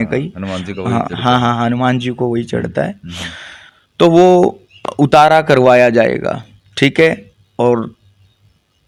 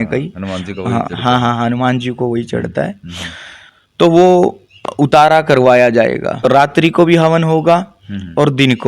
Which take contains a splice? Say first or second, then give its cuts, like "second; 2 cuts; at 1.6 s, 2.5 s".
second; 1 cut; at 6.4 s